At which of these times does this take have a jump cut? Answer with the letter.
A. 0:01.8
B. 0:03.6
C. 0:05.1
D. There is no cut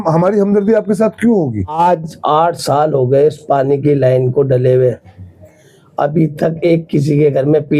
A